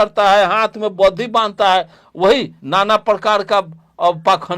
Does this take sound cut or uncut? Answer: cut